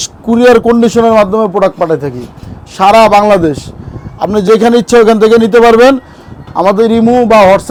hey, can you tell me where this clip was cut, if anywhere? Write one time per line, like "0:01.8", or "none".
none